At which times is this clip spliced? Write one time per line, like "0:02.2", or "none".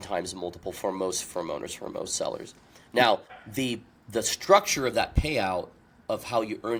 none